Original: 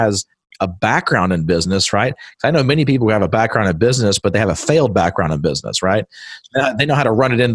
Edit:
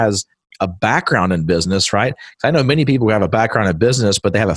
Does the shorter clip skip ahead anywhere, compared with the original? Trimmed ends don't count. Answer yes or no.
no